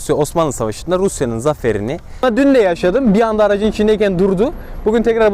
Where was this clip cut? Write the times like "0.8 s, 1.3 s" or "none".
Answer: 2.2 s